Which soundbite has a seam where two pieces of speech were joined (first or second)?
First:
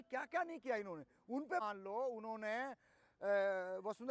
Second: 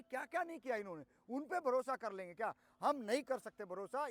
first